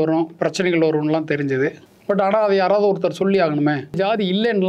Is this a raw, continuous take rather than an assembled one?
no; 2 cuts; at 1.9 s, 4.0 s

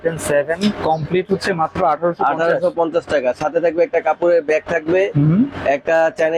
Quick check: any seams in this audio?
no; 0 cuts

